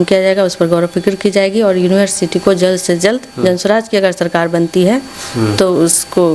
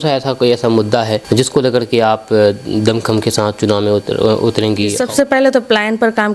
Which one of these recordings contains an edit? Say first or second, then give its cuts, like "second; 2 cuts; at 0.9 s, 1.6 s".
second; 2 cuts; at 1.2 s, 5.0 s